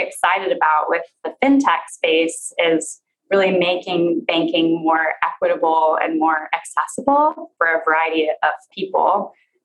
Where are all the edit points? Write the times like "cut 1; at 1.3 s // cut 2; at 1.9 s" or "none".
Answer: cut 1; at 1.3 s // cut 2; at 7.5 s // cut 3; at 8.7 s